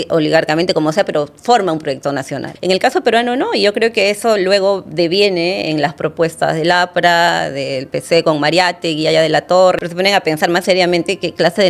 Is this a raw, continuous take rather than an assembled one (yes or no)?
no